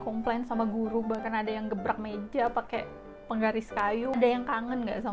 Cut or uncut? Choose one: cut